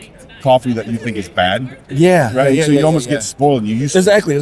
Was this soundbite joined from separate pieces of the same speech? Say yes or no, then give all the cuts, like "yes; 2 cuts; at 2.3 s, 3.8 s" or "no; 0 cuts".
no; 0 cuts